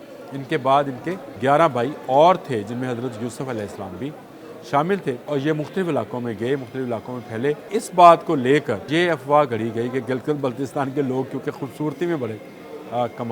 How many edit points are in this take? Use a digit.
4